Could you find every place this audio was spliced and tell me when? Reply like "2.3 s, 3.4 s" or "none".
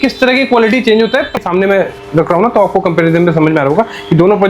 1.3 s